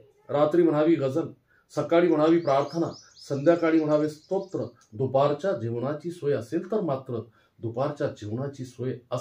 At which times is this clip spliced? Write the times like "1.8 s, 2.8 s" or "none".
none